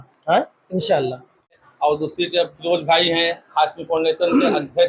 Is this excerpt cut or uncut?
cut